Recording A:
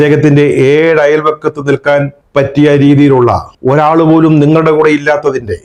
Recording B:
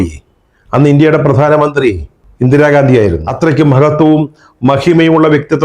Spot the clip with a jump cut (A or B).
B